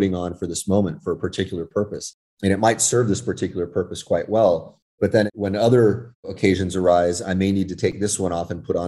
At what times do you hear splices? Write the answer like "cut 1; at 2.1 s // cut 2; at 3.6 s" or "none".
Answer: cut 1; at 5.1 s // cut 2; at 6.3 s

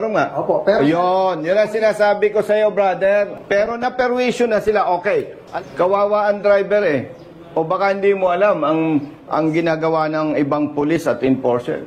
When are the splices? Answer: cut 1; at 3.4 s // cut 2; at 5.4 s

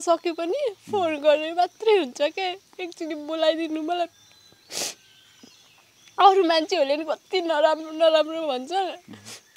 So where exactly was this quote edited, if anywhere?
none

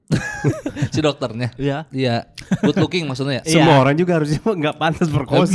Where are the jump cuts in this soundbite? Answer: none

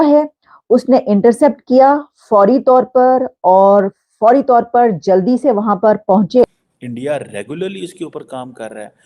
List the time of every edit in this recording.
cut 1; at 6.5 s

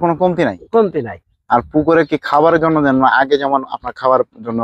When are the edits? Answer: none

